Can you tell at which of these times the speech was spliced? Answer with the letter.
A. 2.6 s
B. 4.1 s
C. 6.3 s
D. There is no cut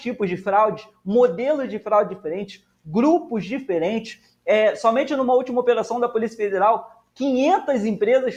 D